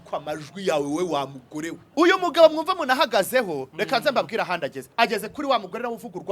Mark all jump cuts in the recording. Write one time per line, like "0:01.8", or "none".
0:01.8